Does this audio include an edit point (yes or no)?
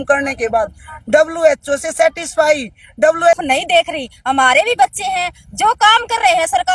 yes